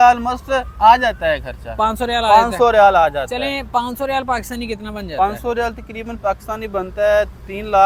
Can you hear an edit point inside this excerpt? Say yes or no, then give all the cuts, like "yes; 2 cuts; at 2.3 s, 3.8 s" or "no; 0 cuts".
no; 0 cuts